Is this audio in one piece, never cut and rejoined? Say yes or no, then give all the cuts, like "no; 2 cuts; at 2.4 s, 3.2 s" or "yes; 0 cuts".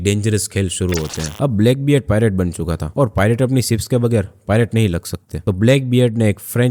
yes; 0 cuts